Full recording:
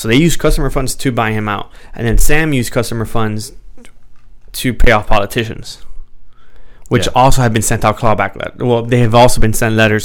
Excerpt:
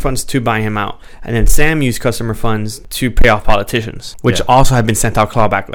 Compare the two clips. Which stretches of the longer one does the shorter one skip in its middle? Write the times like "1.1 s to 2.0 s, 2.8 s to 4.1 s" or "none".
3.5 s to 4.4 s, 5.6 s to 6.7 s